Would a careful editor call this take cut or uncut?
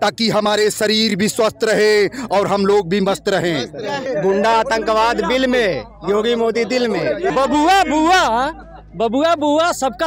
cut